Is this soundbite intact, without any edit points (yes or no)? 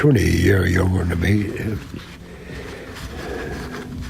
no